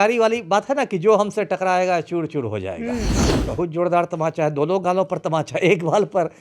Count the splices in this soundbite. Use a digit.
1